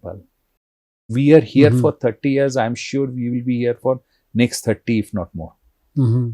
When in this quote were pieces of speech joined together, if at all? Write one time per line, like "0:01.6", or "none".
0:01.1